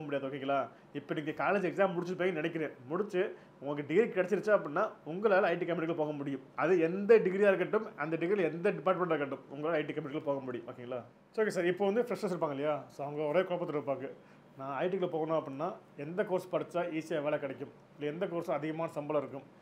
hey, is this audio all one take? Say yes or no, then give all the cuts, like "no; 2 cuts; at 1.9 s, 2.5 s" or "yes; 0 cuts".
yes; 0 cuts